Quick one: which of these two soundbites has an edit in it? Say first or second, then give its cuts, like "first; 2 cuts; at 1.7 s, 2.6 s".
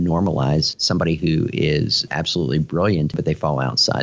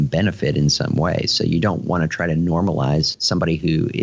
first; 1 cut; at 3.1 s